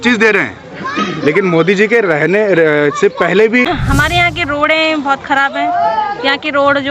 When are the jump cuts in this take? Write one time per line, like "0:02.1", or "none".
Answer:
0:03.6